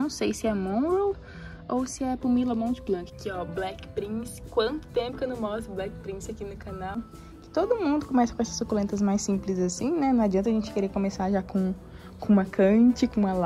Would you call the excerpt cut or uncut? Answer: cut